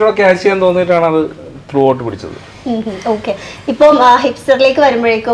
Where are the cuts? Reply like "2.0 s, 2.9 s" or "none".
none